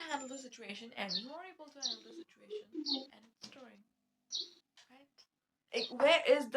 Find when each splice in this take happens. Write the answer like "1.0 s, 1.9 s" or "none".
none